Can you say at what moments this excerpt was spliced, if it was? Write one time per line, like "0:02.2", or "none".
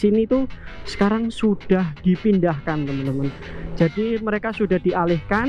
none

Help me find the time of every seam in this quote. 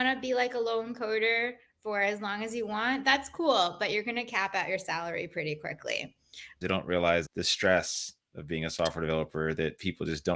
0:06.6
0:07.3

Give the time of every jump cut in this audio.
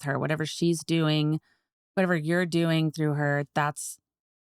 none

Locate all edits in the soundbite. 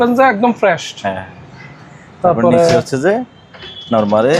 none

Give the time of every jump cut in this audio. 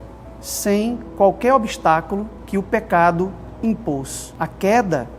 0:02.3
0:04.2

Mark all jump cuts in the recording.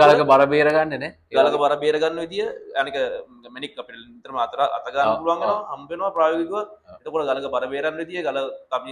none

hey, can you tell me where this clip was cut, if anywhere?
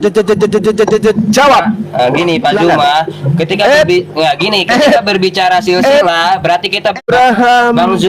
0:07.0

